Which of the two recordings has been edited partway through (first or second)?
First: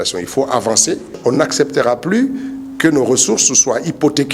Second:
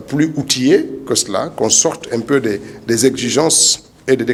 first